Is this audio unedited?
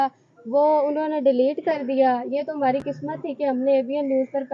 yes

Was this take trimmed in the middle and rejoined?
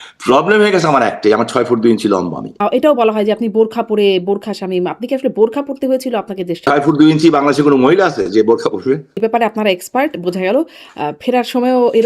yes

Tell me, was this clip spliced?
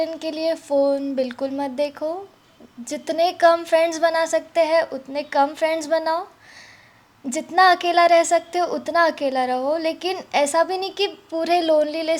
no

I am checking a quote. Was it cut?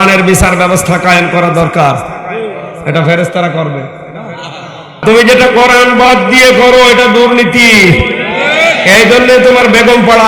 yes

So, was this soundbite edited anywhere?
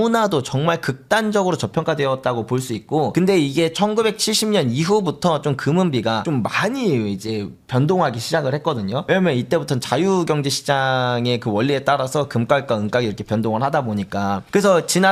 no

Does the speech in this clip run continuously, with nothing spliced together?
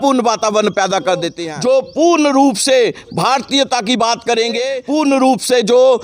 no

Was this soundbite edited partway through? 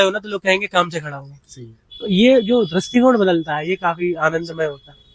no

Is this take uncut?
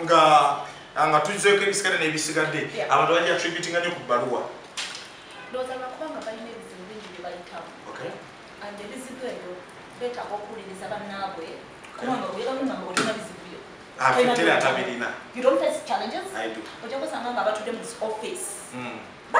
yes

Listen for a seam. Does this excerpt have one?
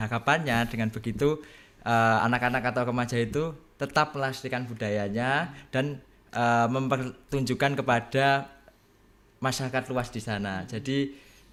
no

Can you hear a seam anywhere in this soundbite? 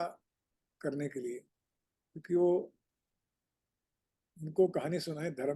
no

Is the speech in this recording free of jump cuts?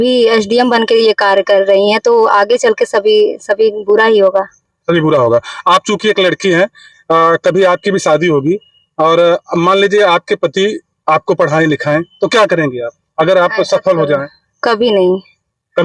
yes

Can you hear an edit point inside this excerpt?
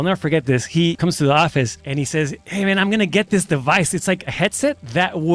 yes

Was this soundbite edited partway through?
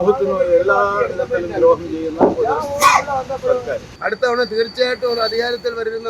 yes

